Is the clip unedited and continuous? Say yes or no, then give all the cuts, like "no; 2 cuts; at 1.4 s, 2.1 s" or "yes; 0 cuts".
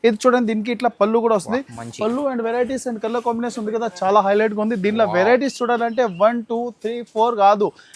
yes; 0 cuts